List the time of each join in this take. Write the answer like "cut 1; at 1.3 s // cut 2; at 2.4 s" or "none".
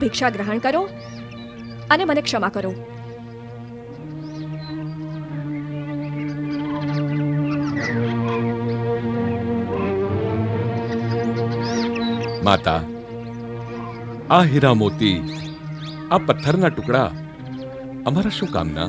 none